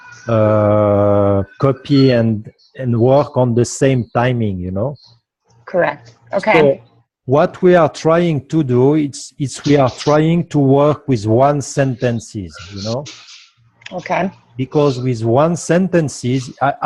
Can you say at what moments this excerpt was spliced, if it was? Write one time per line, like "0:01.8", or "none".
0:06.2